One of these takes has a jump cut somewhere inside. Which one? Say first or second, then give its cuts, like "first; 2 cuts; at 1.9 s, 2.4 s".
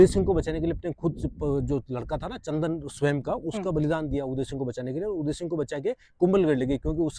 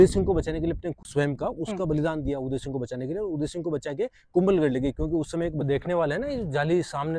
second; 2 cuts; at 1.0 s, 5.6 s